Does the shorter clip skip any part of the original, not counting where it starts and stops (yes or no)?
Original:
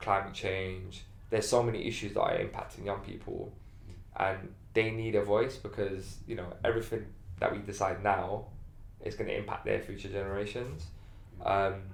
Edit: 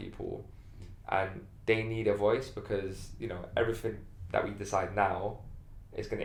no